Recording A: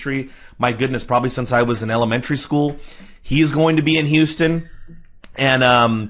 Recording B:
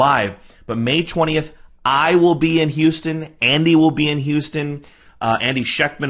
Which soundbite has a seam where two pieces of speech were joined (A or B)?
A